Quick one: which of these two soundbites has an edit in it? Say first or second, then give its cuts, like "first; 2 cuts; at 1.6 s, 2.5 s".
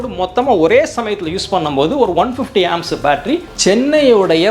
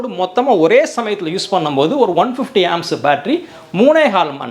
first; 1 cut; at 3.5 s